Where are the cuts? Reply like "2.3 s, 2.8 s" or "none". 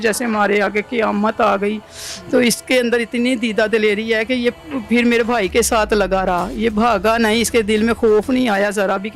none